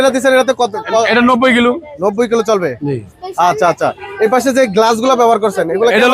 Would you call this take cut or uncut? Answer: uncut